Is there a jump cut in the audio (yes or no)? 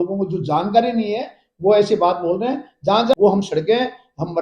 yes